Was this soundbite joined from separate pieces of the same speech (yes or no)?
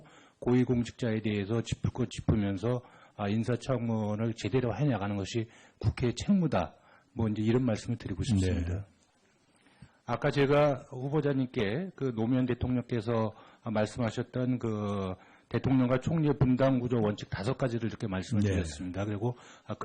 yes